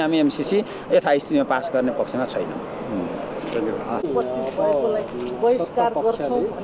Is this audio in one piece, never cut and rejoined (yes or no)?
yes